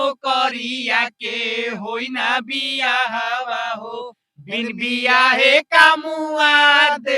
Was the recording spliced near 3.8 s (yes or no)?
no